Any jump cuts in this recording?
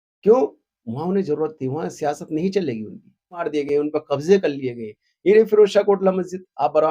yes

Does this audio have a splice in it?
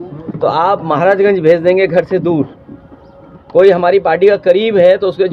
no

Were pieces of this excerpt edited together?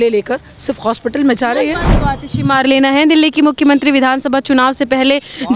yes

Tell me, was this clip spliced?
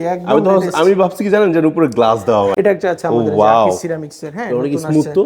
yes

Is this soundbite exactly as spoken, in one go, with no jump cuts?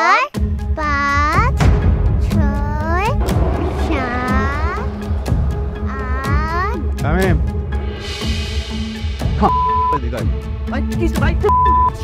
yes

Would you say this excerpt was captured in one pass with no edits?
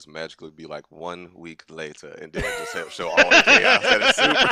yes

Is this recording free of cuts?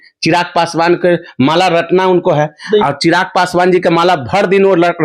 yes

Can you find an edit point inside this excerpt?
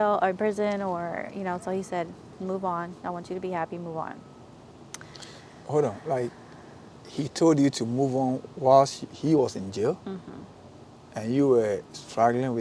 no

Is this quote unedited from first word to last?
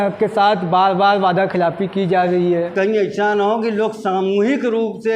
no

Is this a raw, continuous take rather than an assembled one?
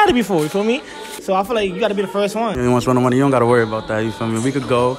no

